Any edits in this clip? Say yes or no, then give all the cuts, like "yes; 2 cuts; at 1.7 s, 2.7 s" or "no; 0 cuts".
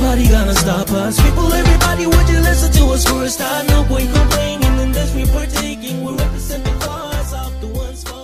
no; 0 cuts